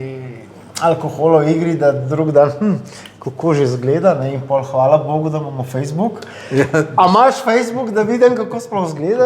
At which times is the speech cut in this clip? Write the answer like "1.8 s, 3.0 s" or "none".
none